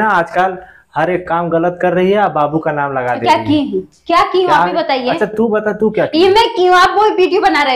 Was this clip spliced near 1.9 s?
no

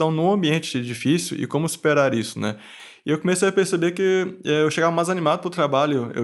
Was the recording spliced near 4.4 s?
no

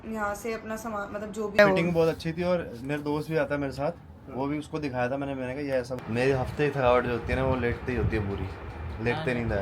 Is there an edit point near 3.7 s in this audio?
no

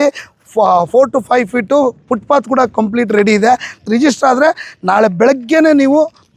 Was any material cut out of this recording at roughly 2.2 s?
no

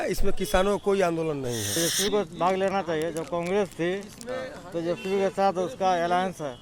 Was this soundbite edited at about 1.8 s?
yes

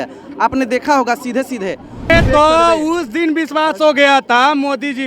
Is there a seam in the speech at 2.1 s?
yes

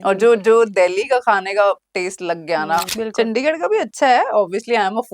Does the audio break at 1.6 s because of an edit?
no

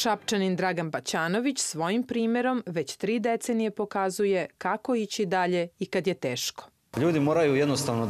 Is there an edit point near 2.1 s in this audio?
no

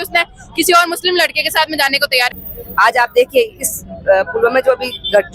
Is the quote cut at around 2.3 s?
yes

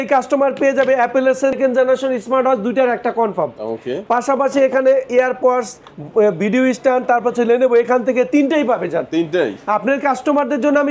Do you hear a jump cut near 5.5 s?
no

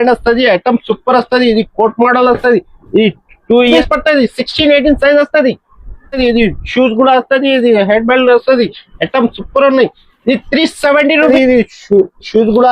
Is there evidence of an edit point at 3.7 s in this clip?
yes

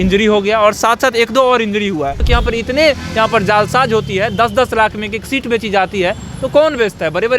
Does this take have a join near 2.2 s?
yes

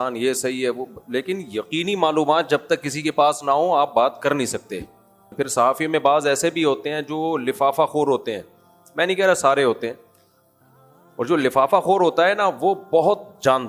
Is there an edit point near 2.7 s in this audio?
no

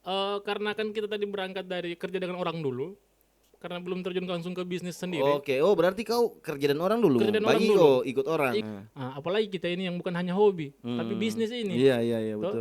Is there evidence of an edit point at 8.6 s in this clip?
yes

